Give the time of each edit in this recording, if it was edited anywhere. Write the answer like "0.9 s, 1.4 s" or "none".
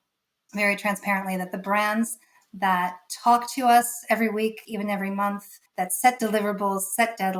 4.6 s